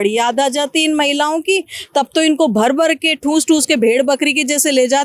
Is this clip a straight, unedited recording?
yes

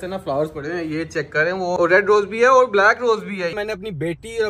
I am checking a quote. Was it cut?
yes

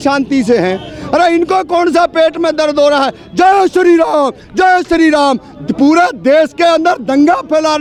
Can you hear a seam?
no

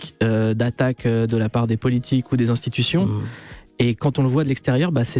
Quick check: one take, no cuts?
yes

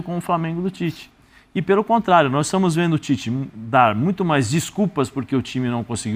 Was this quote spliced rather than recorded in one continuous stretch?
no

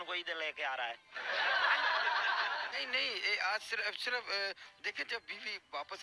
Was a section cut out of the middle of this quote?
no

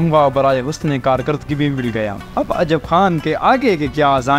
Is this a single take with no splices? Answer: no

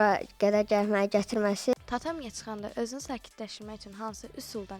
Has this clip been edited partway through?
yes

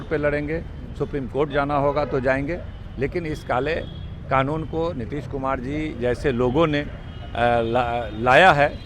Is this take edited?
no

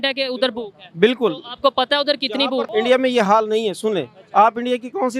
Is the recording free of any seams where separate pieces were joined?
no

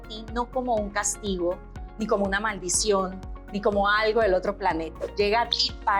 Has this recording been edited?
yes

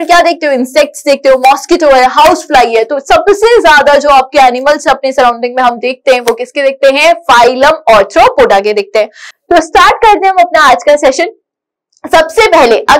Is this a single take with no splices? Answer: yes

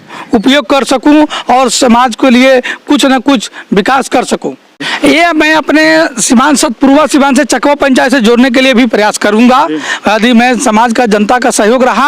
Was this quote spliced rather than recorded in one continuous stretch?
yes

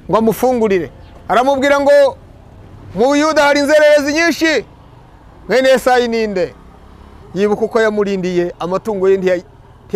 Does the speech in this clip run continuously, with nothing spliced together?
yes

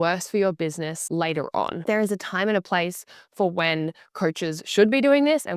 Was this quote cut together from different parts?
yes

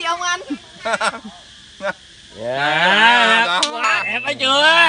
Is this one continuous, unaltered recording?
yes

